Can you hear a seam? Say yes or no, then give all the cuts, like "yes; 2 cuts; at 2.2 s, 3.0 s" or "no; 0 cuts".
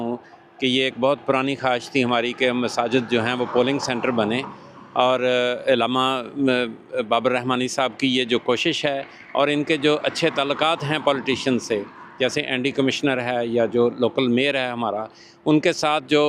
no; 0 cuts